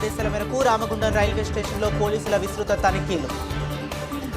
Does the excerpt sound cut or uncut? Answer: uncut